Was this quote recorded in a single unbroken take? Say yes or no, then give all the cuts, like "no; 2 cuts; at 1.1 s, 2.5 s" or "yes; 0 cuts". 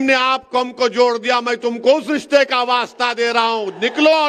yes; 0 cuts